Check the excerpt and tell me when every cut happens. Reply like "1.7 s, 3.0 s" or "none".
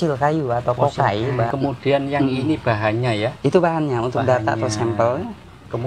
1.5 s